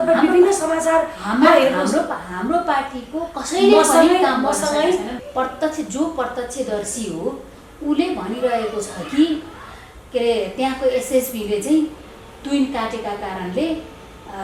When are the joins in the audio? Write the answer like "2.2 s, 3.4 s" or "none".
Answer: 5.1 s